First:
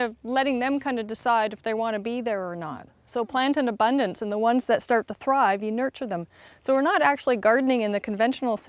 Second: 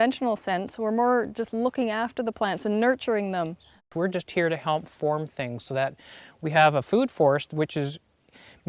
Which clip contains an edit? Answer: second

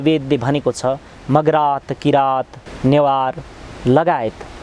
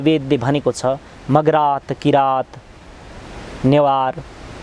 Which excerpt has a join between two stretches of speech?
first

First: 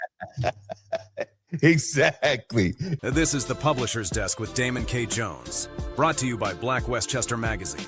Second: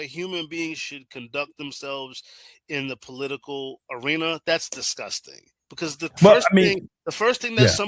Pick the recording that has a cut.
first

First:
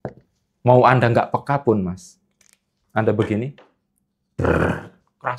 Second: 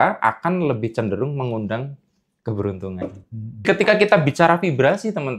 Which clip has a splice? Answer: second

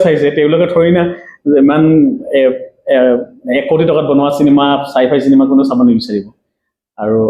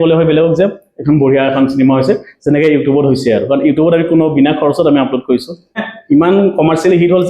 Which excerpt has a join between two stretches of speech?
second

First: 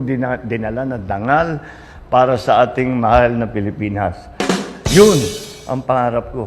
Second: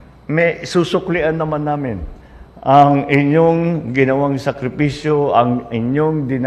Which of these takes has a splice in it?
first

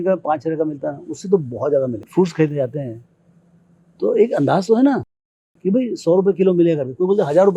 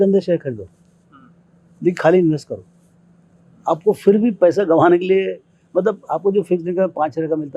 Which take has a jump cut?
first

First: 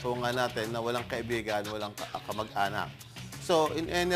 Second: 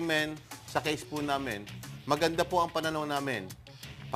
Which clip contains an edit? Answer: second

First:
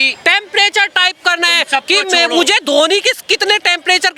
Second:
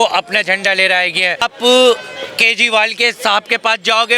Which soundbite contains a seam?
second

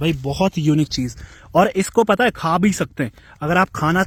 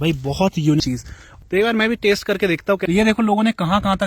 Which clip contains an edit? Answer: second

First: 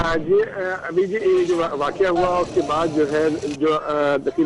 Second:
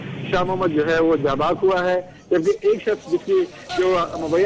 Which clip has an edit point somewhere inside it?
first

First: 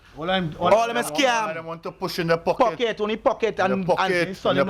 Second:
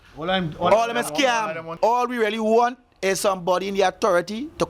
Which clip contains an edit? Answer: second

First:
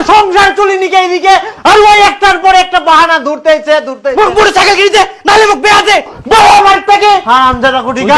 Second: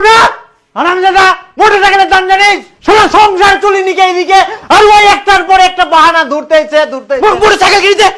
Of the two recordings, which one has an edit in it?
first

